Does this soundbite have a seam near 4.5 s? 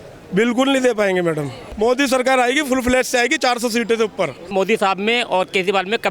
yes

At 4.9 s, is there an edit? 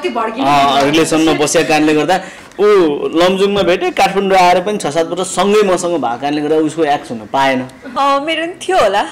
no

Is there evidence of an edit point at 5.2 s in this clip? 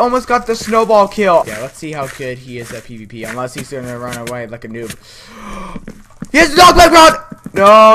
no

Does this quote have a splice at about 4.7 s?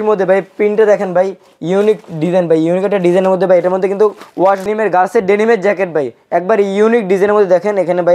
yes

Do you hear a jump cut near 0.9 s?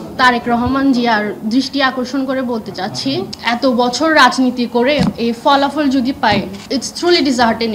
no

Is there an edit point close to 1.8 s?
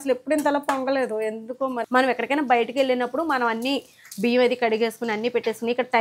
yes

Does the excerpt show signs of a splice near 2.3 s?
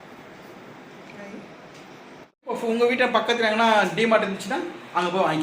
yes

